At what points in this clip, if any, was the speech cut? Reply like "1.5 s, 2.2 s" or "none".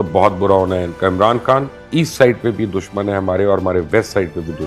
1.8 s